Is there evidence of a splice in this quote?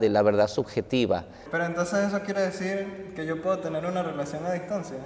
yes; 1 cut; at 1.4 s

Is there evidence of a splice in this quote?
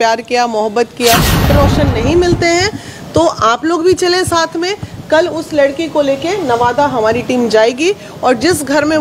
yes; 1 cut; at 1.5 s

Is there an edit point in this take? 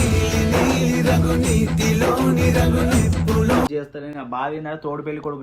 yes; 1 cut; at 3.7 s

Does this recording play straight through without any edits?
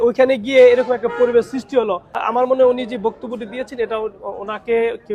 no; 1 cut; at 2.1 s

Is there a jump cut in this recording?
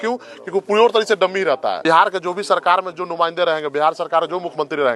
yes; 1 cut; at 1.8 s

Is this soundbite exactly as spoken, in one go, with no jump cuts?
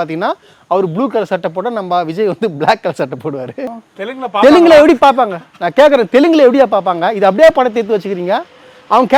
no; 1 cut; at 3.8 s

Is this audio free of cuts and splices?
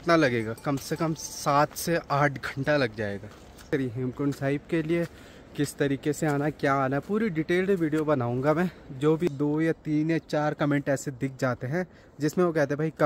no; 2 cuts; at 3.7 s, 9.3 s

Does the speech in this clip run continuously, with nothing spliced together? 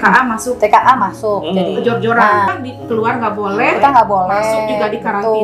no; 1 cut; at 2.5 s

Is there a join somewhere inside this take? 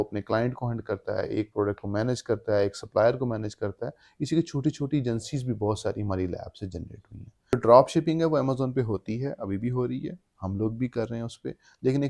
yes; 1 cut; at 7.5 s

